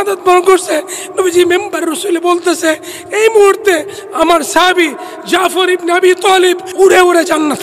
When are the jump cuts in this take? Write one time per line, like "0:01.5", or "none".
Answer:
0:06.7